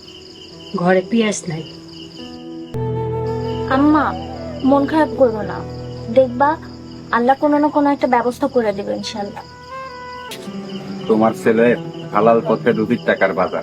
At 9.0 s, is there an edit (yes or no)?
no